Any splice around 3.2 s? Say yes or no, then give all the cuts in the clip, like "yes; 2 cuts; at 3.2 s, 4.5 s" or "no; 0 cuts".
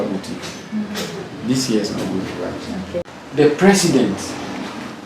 yes; 1 cut; at 3.2 s